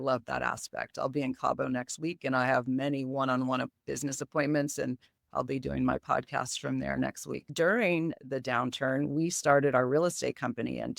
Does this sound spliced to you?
yes; 1 cut; at 7.4 s

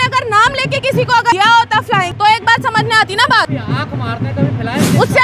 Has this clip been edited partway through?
yes; 2 cuts; at 1.6 s, 3.5 s

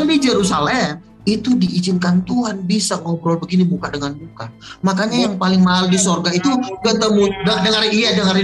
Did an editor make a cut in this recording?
yes; 1 cut; at 1.1 s

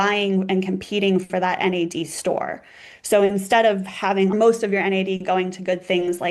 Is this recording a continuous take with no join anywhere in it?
no; 1 cut; at 4.3 s

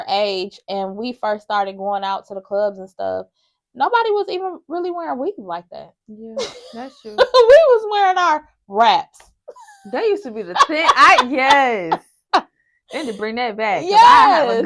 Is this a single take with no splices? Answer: yes; 0 cuts

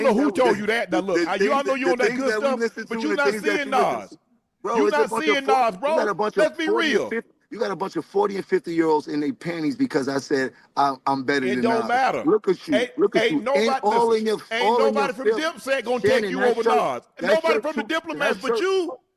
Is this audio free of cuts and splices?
yes; 0 cuts

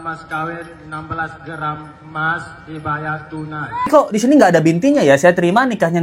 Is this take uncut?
no; 1 cut; at 3.9 s

